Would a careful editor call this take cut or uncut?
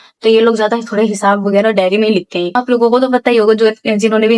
cut